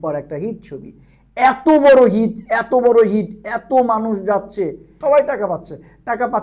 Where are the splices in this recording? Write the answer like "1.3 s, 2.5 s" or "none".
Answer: 4.9 s